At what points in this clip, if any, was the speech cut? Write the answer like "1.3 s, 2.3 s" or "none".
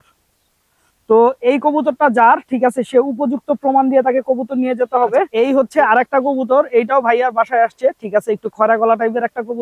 5.3 s